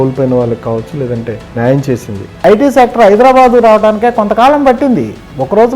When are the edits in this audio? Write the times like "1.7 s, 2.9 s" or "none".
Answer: 1.4 s, 2.3 s